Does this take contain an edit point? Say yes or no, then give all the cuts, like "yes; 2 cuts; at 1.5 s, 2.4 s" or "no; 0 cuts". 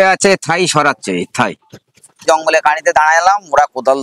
yes; 1 cut; at 2.2 s